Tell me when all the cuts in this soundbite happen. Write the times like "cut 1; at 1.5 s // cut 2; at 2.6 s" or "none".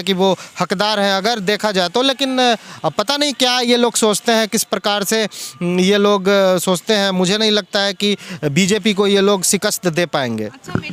none